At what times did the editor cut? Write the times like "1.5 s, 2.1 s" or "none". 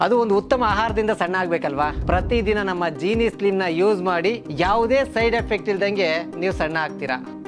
none